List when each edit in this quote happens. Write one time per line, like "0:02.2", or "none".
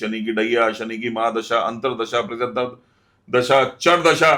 none